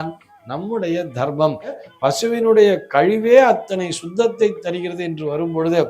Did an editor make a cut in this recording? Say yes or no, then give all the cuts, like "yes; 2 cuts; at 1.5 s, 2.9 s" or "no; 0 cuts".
yes; 1 cut; at 1.8 s